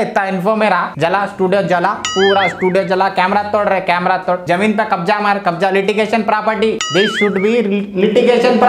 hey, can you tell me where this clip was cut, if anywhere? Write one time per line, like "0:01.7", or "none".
none